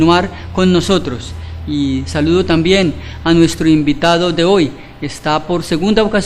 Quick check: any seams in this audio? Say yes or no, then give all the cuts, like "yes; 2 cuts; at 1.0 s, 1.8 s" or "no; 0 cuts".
no; 0 cuts